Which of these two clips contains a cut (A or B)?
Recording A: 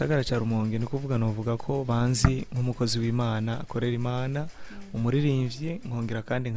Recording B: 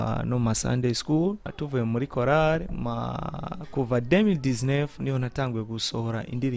B